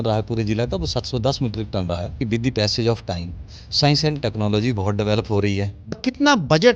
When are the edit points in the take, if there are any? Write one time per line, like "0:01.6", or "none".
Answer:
0:02.2
0:06.0